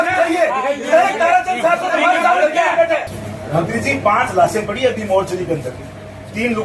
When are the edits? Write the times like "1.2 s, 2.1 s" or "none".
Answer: 3.2 s